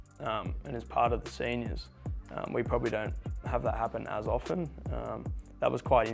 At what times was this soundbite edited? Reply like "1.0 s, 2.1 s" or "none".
none

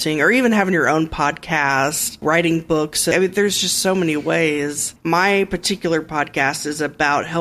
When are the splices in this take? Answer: 2.2 s, 3.1 s, 4.9 s

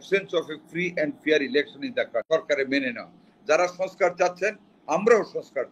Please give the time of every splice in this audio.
2.3 s

